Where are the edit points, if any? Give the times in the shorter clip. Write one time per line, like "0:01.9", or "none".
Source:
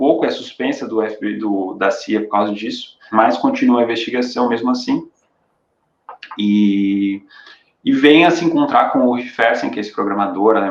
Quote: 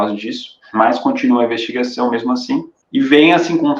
0:02.8